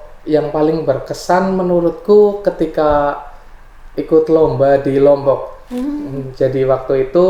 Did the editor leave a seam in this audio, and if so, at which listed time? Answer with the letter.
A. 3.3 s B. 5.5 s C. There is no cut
C